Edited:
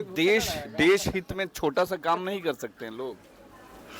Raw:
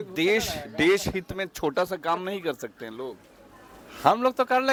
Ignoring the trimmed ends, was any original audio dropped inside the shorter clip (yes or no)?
no